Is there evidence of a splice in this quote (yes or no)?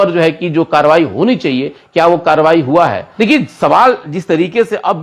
yes